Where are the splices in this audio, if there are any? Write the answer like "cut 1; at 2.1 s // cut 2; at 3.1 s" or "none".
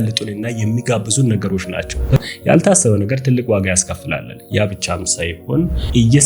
cut 1; at 2.2 s